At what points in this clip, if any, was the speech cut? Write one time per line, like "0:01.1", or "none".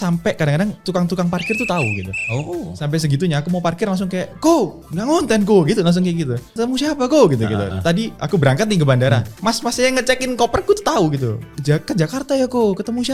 0:00.8
0:02.1
0:06.4
0:09.3